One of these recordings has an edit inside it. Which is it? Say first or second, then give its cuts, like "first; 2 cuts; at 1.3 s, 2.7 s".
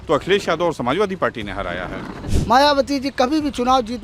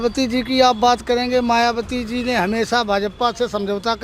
first; 1 cut; at 2.3 s